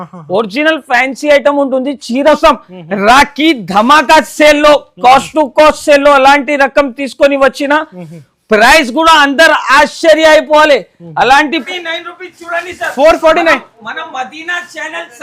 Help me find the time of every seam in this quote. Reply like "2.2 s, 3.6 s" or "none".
2.3 s, 11.7 s